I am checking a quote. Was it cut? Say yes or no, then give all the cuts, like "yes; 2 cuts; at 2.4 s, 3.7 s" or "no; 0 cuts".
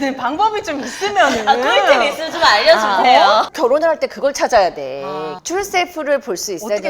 yes; 2 cuts; at 3.5 s, 5.3 s